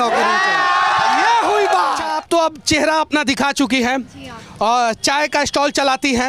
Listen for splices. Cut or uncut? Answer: cut